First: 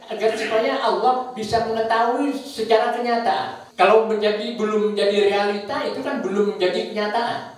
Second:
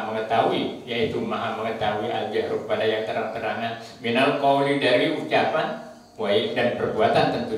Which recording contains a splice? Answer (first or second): first